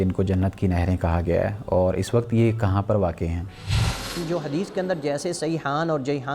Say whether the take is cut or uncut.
cut